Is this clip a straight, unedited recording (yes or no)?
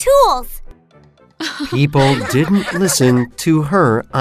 yes